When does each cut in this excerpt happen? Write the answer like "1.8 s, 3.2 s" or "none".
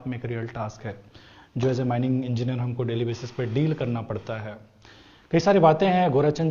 none